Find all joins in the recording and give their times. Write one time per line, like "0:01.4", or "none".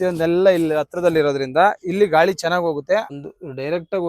0:03.1